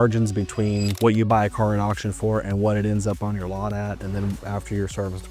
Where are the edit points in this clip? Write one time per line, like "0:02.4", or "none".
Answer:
0:00.9